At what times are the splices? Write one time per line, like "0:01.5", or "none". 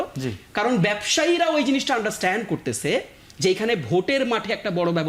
none